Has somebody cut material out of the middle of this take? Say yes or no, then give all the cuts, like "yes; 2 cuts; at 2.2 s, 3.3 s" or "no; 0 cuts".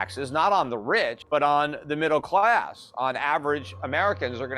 yes; 1 cut; at 1.2 s